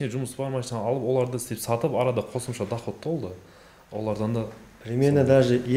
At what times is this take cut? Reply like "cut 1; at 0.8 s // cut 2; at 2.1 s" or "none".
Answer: none